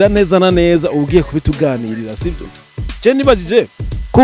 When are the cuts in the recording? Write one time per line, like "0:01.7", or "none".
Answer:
0:02.5